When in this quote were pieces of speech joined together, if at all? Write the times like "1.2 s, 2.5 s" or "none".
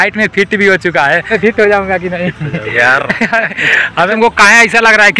1.2 s, 4.1 s